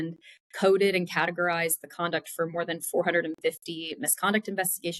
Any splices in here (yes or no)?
no